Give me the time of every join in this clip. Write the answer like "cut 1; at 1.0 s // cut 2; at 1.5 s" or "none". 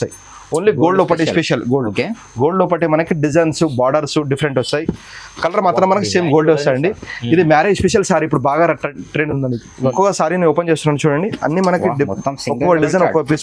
cut 1; at 9.9 s